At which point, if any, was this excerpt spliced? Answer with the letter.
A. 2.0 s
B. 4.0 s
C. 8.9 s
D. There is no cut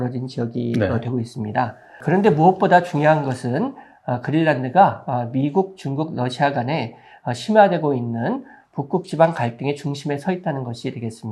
A